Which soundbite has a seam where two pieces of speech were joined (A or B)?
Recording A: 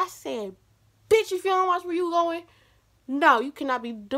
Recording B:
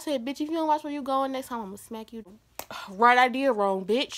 B